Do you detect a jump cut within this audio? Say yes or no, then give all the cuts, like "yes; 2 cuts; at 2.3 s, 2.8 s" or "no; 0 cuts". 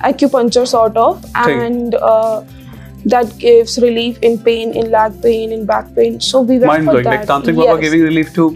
no; 0 cuts